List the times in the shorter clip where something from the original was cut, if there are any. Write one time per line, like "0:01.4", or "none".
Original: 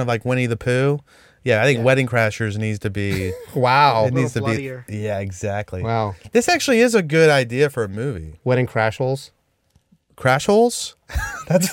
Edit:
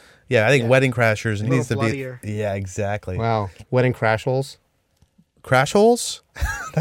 0:01.5
0:03.5

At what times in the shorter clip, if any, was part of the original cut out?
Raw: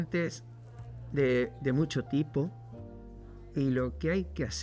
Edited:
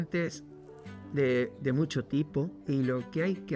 0:02.6

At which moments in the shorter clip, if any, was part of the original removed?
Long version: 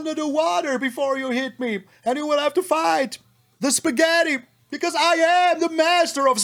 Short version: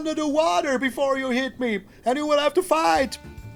none

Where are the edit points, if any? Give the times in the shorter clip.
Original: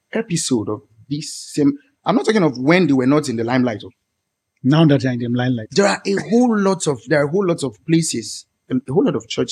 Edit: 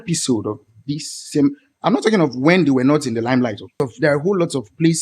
0:03.8

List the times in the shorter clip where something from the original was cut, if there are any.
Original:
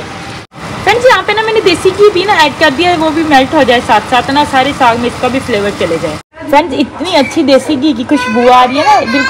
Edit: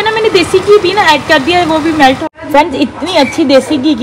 0:02.2

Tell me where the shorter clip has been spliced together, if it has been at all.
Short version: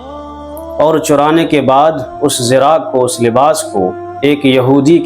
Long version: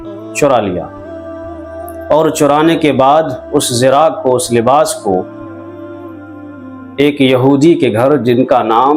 0:04.1

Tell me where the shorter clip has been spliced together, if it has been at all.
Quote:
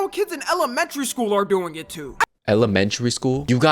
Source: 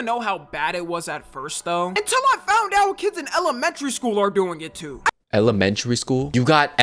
none

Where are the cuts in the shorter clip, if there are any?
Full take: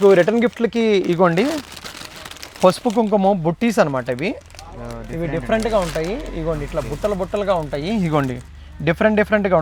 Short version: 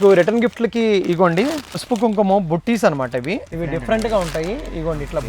0:01.8
0:03.5

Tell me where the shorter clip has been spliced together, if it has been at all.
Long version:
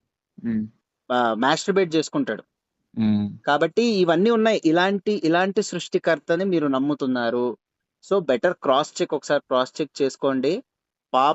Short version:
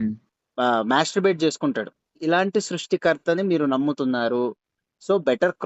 0:02.2

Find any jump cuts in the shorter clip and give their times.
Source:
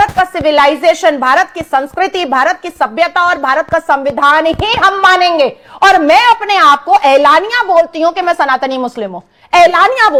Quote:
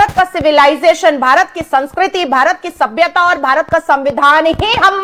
none

